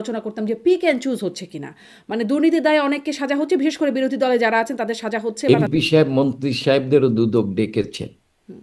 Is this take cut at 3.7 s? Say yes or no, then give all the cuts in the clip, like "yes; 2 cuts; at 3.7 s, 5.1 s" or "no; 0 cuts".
no; 1 cut; at 5.4 s